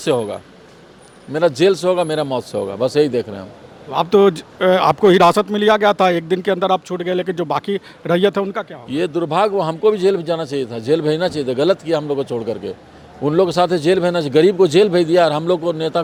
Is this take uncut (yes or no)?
yes